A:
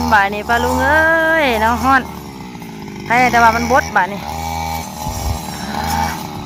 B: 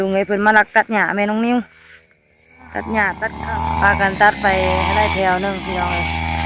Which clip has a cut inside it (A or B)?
B